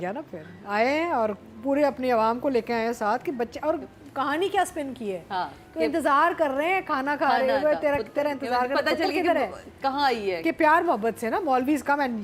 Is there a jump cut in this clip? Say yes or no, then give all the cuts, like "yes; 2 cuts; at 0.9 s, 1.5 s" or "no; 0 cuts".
no; 0 cuts